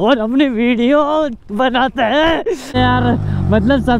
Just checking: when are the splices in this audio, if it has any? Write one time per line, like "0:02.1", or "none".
0:02.6